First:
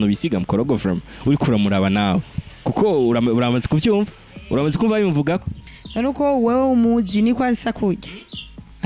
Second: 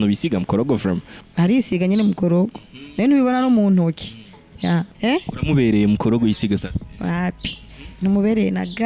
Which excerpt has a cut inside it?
second; 2 cuts; at 1.1 s, 4.9 s

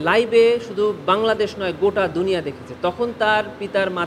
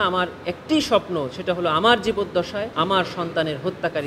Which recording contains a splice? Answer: second; 1 cut; at 2.7 s

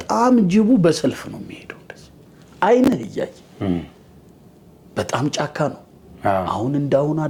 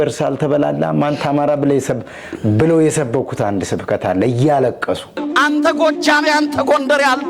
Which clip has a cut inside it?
second; 2 cuts; at 4.4 s, 5.2 s

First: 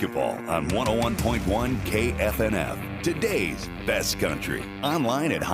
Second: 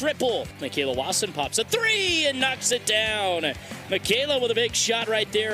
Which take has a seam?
second; 1 cut; at 1.1 s

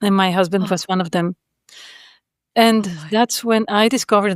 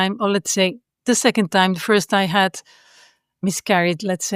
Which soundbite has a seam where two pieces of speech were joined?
second; 1 cut; at 3.4 s

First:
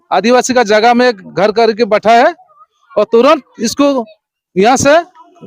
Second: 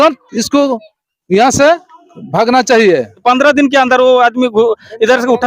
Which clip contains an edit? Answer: second; 1 cut; at 3.2 s

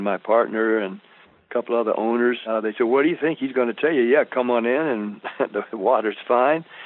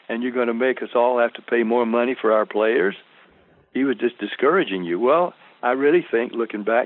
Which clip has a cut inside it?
first; 1 cut; at 2.4 s

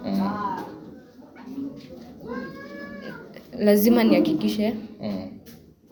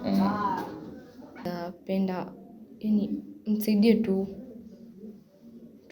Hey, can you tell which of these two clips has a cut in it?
second; 1 cut; at 1.5 s

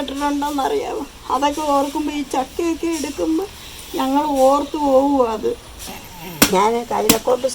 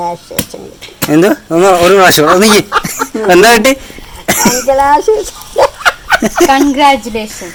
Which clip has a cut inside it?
first; 1 cut; at 5.9 s

